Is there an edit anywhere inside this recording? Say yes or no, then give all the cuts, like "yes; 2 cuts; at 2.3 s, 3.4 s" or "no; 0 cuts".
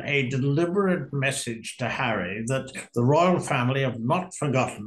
no; 0 cuts